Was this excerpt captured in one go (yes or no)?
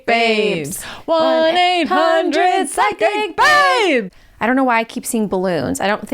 no